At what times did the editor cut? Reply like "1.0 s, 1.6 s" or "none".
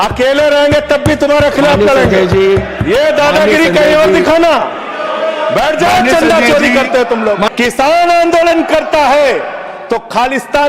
7.5 s